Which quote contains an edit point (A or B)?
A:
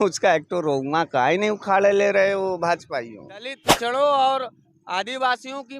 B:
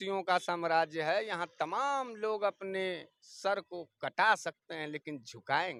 A